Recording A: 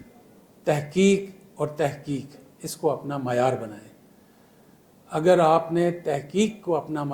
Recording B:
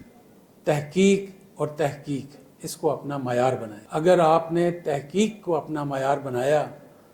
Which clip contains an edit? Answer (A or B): B